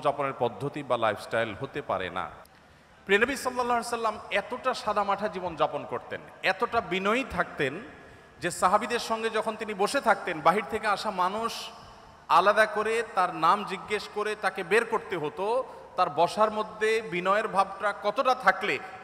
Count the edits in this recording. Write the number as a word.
one